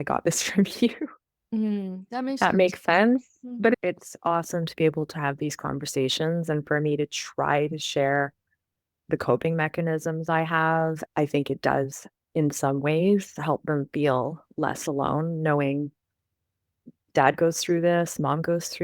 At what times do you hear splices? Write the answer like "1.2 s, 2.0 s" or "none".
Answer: 3.8 s, 11.0 s